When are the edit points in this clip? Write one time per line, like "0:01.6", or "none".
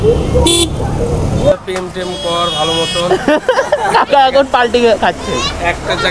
0:01.5

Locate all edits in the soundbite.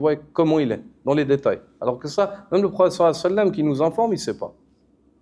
none

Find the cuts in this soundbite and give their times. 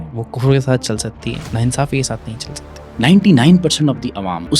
0:01.4
0:02.9

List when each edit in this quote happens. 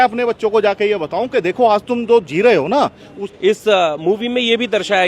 0:03.2

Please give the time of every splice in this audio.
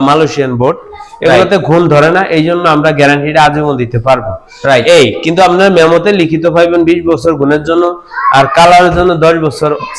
none

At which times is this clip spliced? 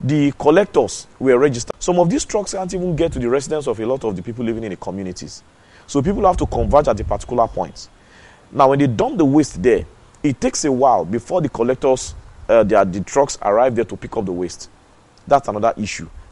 0:01.6

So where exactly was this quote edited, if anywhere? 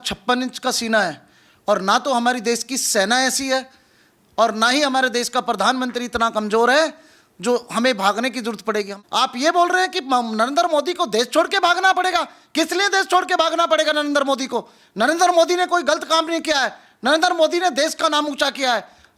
0:08.9

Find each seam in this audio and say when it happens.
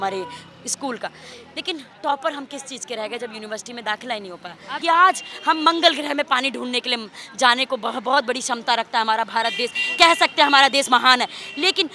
0:04.7

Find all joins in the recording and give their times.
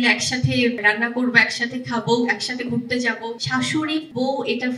0:00.8
0:03.8

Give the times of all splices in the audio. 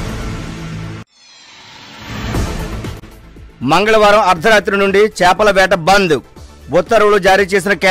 0:03.1

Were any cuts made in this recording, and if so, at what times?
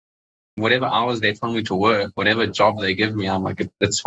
none

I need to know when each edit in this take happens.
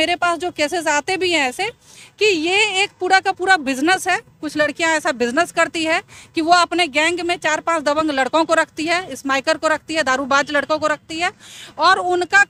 none

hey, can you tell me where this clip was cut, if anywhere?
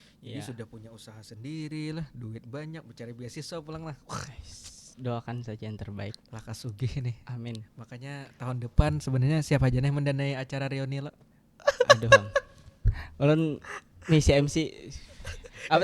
none

